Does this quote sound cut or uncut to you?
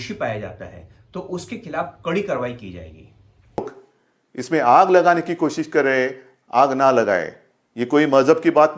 cut